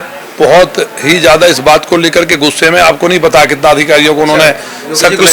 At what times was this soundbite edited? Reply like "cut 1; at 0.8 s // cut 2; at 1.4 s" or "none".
none